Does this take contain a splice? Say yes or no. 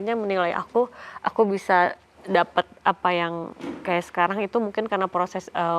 no